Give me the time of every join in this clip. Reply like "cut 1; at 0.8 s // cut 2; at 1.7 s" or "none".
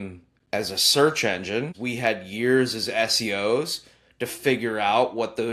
cut 1; at 1.8 s